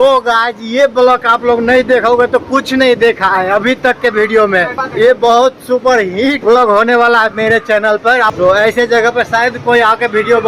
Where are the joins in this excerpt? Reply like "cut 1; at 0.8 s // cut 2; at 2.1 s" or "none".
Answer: cut 1; at 4.8 s // cut 2; at 6.4 s // cut 3; at 8.3 s